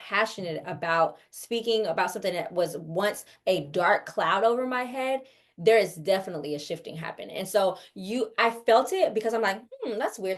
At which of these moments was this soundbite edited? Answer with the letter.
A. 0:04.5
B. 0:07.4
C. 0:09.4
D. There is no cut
D